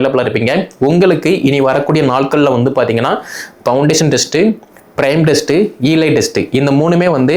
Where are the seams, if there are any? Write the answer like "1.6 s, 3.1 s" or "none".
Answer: none